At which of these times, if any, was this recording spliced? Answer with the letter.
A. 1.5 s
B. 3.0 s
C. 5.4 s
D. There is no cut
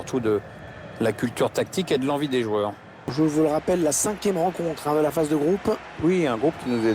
B